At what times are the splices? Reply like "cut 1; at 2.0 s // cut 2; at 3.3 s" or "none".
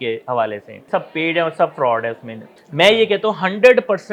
cut 1; at 0.9 s // cut 2; at 2.5 s